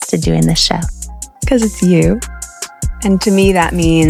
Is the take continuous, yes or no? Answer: yes